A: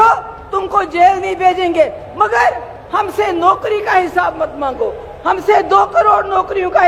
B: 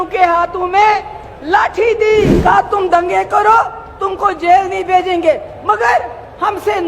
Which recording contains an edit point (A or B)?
B